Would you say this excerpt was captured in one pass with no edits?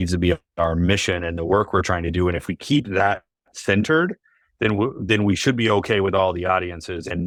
yes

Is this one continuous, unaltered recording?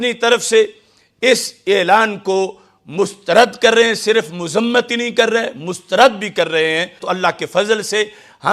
no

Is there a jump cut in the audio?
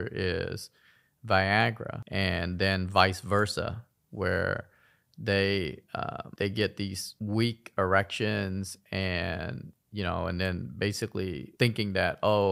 no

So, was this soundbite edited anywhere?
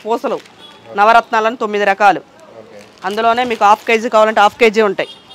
no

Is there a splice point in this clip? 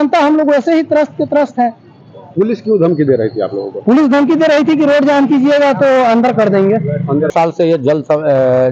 yes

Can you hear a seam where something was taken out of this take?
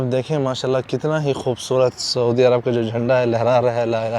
no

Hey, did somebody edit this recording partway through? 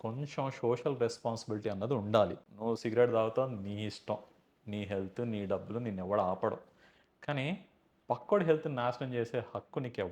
yes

